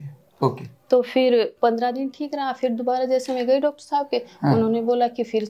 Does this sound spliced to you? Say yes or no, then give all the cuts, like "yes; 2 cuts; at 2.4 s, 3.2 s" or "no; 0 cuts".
yes; 1 cut; at 1.5 s